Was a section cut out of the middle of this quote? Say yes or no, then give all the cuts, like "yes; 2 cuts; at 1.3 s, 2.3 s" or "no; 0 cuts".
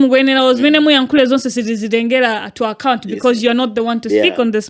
no; 0 cuts